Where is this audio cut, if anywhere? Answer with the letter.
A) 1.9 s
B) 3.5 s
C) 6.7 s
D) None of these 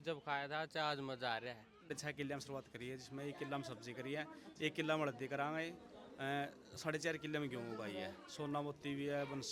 A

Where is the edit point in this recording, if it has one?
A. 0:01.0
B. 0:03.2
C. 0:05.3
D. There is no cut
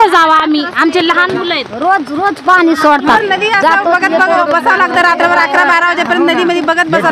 B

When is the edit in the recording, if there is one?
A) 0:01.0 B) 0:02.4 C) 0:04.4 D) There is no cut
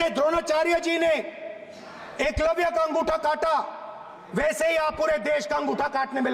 D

